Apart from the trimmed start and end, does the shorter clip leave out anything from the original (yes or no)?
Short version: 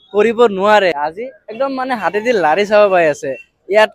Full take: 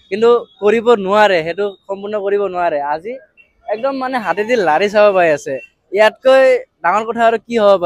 yes